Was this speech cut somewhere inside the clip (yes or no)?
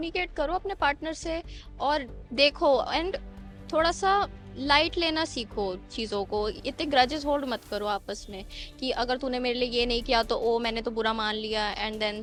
no